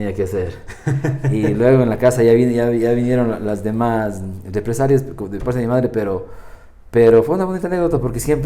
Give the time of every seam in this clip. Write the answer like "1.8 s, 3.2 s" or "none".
none